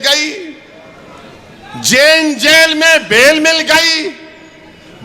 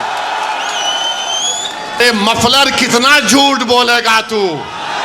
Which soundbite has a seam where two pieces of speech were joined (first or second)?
second